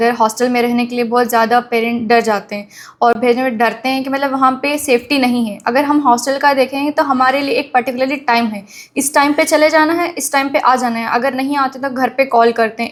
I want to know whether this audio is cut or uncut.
uncut